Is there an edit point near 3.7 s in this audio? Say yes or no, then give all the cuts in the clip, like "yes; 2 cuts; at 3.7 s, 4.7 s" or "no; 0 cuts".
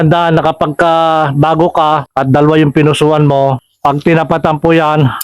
yes; 2 cuts; at 2.1 s, 3.7 s